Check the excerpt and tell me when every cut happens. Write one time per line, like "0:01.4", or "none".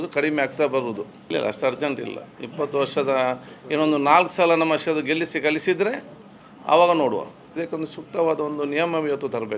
0:01.3
0:07.6

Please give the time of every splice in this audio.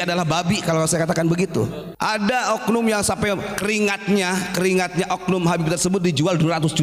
0:01.8

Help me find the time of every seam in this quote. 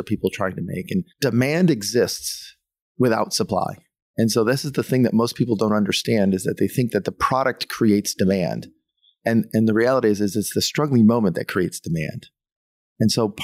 0:01.1

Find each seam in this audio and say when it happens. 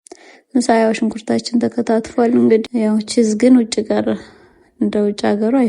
0:02.7

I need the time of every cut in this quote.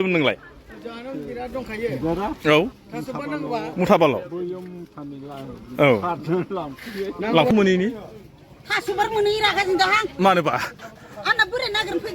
0:07.5

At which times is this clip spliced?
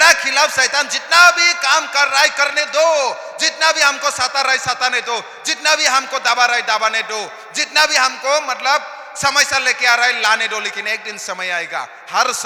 none

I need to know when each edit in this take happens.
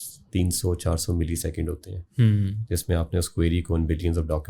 none

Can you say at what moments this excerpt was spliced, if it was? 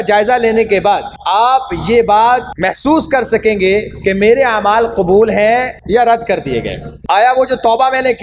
0:01.1
0:02.5
0:05.8

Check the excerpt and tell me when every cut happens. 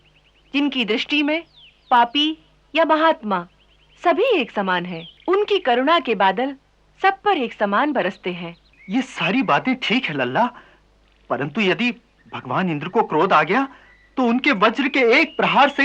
none

